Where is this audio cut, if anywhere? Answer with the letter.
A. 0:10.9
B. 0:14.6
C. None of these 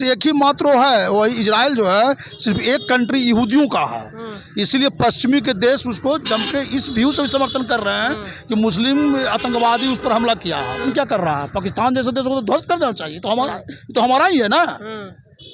A